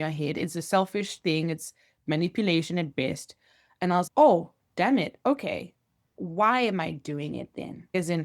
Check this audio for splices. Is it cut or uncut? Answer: cut